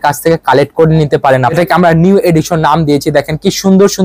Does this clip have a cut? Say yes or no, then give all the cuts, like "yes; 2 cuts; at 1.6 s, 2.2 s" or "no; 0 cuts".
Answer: yes; 1 cut; at 1.5 s